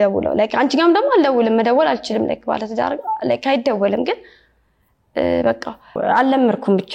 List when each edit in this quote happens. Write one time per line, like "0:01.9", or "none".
0:06.0